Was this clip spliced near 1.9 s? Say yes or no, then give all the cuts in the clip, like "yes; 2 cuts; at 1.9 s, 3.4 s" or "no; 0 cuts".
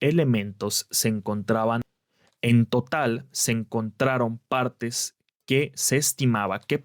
yes; 1 cut; at 1.9 s